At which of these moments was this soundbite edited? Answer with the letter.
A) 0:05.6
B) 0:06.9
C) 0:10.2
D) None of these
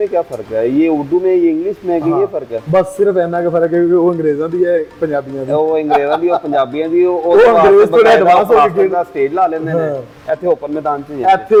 D